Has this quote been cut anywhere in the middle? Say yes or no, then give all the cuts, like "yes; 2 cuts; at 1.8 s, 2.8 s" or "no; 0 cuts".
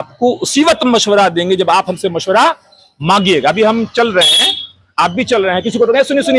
no; 0 cuts